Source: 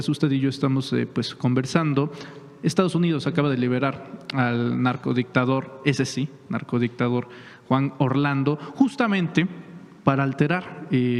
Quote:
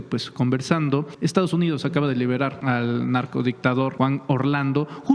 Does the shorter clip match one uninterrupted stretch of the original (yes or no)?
no